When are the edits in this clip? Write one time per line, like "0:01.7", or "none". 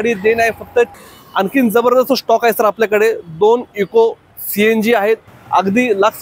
0:00.9
0:05.3